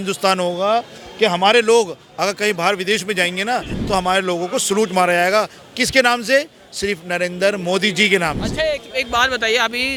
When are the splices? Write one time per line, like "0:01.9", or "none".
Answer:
none